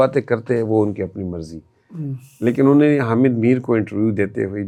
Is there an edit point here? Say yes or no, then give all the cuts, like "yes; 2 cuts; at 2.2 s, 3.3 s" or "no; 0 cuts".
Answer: no; 0 cuts